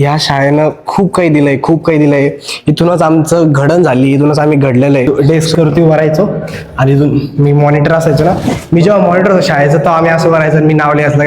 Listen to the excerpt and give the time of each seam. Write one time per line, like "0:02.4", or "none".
0:05.1